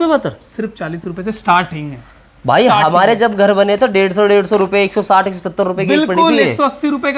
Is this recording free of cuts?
yes; 0 cuts

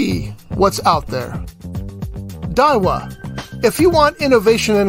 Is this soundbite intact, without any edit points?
yes; 0 cuts

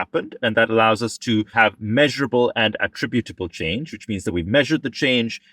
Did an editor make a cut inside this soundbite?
yes; 1 cut; at 1.5 s

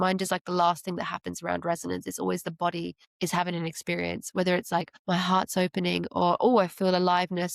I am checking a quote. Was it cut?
yes; 2 cuts; at 3.0 s, 5.0 s

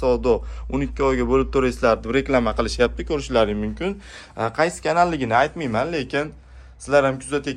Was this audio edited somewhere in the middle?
no; 0 cuts

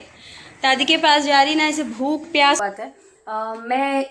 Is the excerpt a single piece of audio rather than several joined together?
no; 1 cut; at 2.6 s

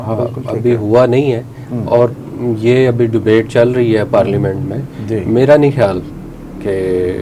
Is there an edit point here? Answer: no; 0 cuts

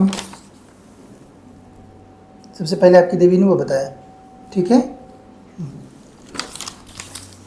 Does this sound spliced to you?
no; 0 cuts

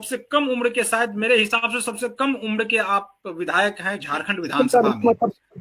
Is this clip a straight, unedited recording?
yes; 0 cuts

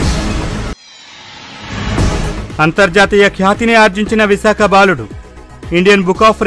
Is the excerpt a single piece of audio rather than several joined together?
yes; 0 cuts

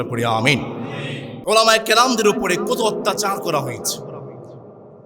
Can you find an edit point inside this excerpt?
yes; 1 cut; at 1.3 s

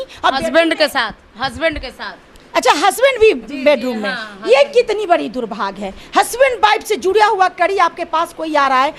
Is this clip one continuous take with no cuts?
yes; 0 cuts

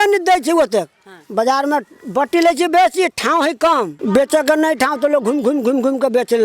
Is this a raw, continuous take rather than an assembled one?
no; 1 cut; at 3.9 s

